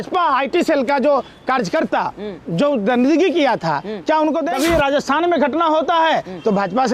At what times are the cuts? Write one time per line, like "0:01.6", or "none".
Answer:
0:04.5